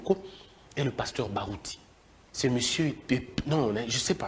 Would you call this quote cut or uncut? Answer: uncut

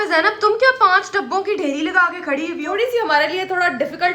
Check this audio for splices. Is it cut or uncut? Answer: cut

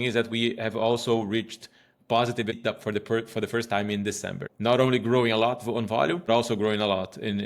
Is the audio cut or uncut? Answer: uncut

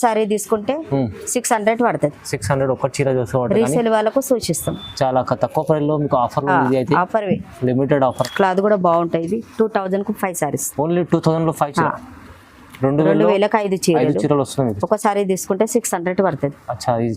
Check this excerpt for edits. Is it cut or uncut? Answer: cut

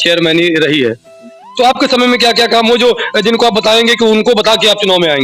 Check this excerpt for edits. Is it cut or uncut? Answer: uncut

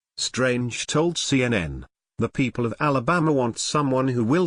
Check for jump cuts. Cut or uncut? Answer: cut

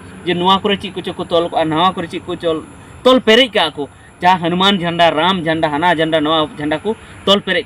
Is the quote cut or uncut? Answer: uncut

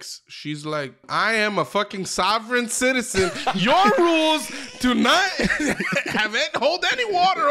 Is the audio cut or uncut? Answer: cut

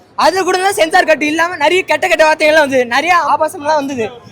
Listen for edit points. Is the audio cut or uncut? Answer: cut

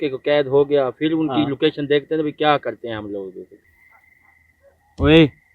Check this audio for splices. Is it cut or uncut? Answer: cut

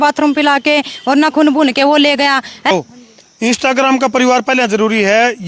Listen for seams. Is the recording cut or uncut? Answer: cut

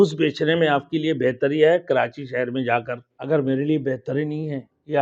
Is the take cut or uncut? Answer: cut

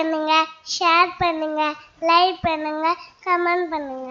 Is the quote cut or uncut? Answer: uncut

